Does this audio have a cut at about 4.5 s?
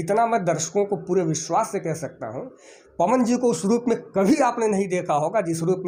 no; 0 cuts

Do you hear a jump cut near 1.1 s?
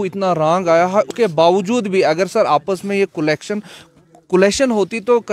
yes; 1 cut; at 1.1 s

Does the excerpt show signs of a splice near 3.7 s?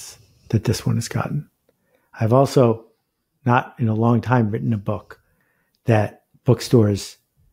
no; 1 cut; at 6.2 s

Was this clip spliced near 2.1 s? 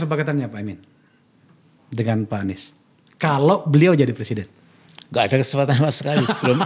no; 0 cuts

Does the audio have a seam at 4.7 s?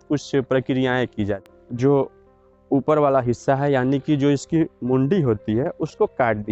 no; 1 cut; at 1.5 s

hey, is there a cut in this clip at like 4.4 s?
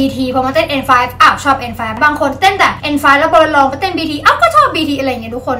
no; 2 cuts; at 1.9 s, 2.8 s

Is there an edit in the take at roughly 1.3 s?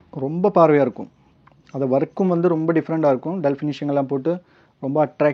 no; 0 cuts

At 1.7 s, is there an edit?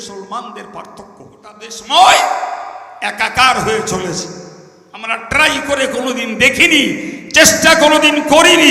yes; 1 cut; at 1.7 s

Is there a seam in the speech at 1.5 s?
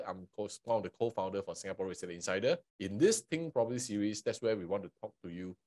no; 1 cut; at 2.7 s

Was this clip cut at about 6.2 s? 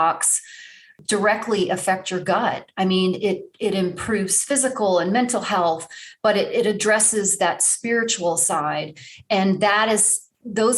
no; 1 cut; at 1.0 s

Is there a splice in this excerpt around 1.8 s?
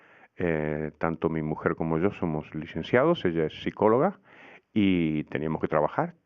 yes; 1 cut; at 1.8 s

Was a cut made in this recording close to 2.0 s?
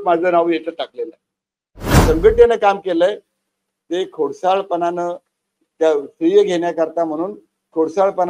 yes; 1 cut; at 2.0 s

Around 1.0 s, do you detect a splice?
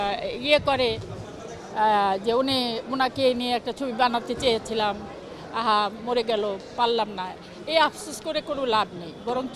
no; 0 cuts

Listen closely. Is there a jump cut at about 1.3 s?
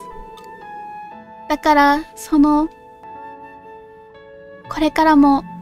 no; 1 cut; at 3.0 s

